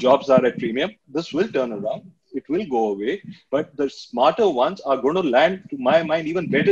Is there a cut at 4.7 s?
no; 1 cut; at 1.1 s

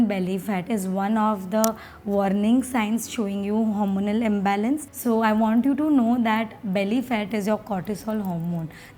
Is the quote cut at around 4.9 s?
yes; 1 cut; at 4.9 s

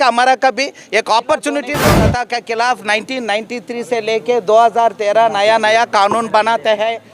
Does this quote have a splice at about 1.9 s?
yes; 1 cut; at 1.9 s

